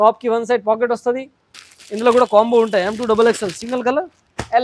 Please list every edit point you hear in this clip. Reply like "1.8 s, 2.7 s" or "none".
none